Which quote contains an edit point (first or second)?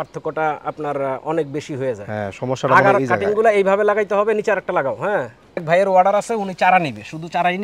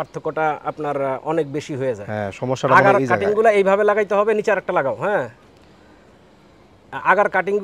first